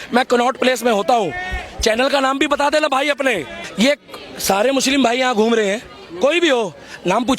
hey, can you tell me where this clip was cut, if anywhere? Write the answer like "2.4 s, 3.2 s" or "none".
3.6 s